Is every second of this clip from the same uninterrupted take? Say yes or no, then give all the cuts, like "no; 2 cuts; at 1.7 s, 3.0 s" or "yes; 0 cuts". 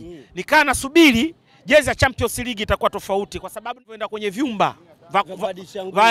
no; 1 cut; at 3.9 s